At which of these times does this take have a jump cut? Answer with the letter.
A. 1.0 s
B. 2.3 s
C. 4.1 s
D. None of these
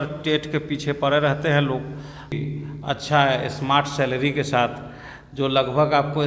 B